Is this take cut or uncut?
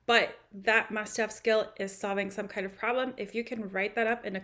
uncut